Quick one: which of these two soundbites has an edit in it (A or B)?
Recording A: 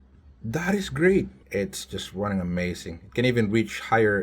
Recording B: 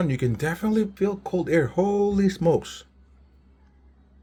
A